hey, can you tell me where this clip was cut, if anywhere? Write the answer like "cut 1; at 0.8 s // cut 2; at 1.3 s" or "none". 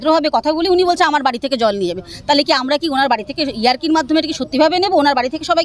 none